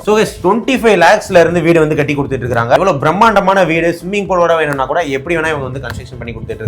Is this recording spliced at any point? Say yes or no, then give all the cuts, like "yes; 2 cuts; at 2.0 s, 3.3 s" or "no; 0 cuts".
yes; 1 cut; at 2.8 s